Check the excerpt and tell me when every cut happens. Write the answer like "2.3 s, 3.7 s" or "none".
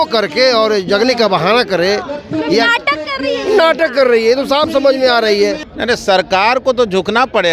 5.7 s